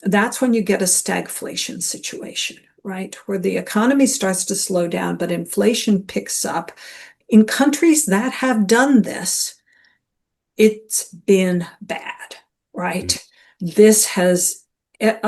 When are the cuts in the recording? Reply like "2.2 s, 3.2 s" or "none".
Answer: 7.2 s